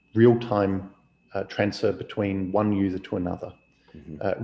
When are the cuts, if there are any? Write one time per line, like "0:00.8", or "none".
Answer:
none